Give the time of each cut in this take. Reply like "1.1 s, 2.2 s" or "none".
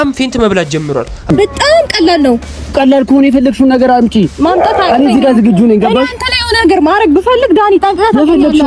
1.1 s